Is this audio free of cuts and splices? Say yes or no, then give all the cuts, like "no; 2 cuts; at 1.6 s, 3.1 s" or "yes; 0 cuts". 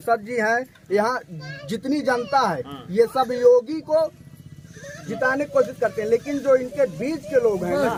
yes; 0 cuts